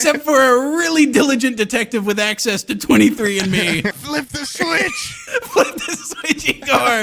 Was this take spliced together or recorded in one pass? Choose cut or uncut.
cut